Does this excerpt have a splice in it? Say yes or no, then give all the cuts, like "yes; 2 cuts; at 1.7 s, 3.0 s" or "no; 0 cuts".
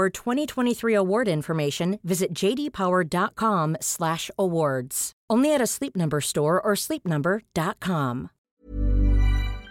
yes; 1 cut; at 8.4 s